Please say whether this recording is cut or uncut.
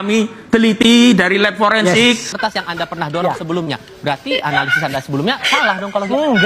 cut